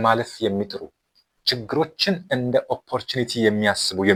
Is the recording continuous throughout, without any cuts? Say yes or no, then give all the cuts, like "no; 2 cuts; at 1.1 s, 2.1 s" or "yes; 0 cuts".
yes; 0 cuts